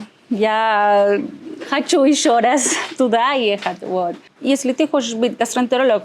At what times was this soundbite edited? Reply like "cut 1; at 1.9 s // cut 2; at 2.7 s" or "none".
cut 1; at 4.3 s